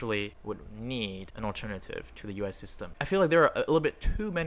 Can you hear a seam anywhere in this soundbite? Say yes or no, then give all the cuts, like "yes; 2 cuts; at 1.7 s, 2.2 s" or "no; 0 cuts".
yes; 2 cuts; at 1.3 s, 3.0 s